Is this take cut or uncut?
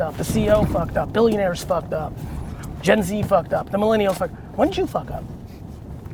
uncut